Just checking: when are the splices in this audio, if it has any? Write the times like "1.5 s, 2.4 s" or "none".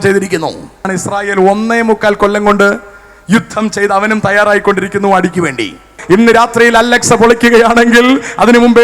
0.9 s, 5.9 s